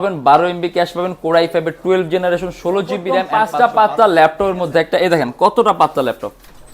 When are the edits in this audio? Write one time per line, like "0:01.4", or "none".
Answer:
0:03.3